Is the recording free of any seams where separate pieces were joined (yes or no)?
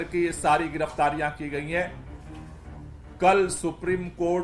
yes